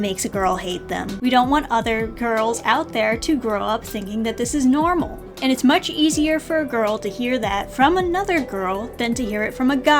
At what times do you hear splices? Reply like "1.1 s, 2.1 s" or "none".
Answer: 1.1 s